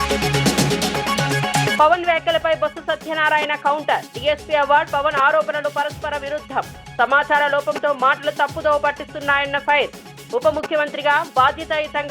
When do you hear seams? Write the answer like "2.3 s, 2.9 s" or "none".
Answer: 1.7 s